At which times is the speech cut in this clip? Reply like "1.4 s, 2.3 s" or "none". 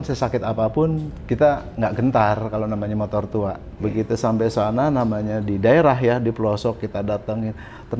1.1 s, 3.7 s